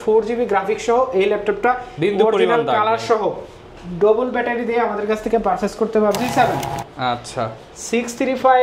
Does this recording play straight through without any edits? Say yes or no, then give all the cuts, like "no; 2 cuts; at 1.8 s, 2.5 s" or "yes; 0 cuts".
no; 1 cut; at 6.2 s